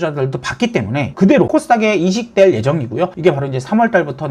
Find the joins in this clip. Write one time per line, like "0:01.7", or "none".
0:01.1
0:03.1